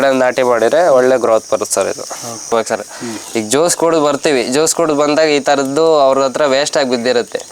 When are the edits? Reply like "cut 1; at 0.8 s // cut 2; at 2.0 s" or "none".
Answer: cut 1; at 2.5 s

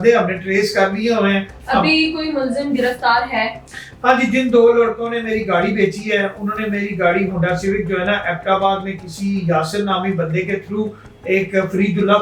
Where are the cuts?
none

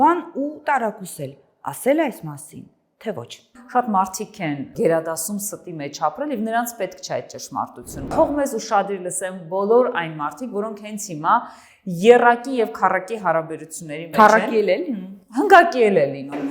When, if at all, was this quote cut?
cut 1; at 3.5 s // cut 2; at 4.7 s // cut 3; at 8.1 s

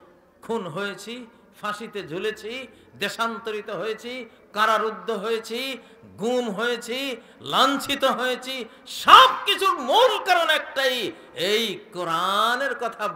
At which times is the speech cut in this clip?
none

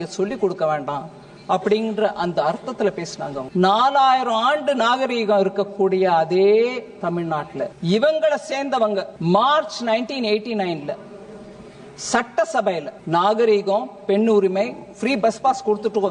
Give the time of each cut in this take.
cut 1; at 3.5 s // cut 2; at 7.8 s // cut 3; at 9.1 s // cut 4; at 13.0 s

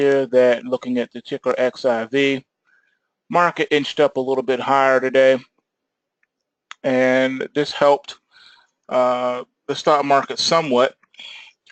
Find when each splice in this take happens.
cut 1; at 8.4 s

